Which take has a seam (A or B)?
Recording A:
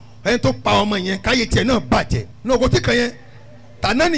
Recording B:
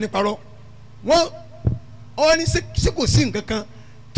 A